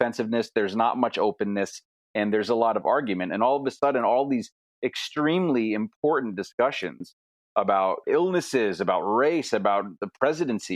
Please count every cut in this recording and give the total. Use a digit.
1